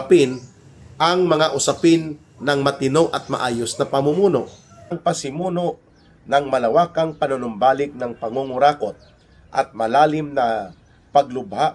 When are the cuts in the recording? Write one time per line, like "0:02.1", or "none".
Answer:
0:05.0